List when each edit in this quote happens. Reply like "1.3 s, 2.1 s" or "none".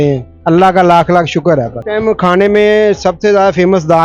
1.8 s